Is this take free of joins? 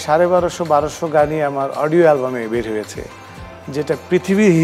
yes; 0 cuts

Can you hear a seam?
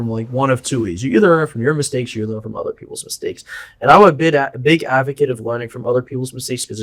no; 0 cuts

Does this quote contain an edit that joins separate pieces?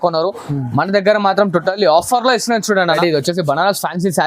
yes; 1 cut; at 3.0 s

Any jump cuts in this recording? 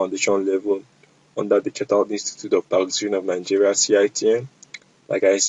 no; 0 cuts

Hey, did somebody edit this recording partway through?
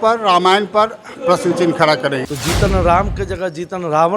yes; 1 cut; at 2.3 s

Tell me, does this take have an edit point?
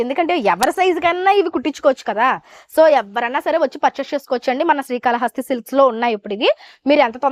no; 0 cuts

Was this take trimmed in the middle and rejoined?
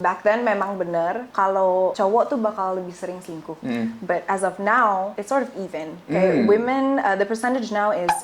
yes; 1 cut; at 1.3 s

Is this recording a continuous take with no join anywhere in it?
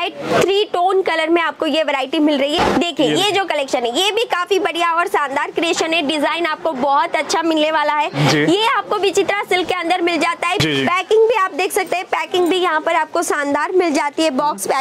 no; 2 cuts; at 2.6 s, 10.6 s

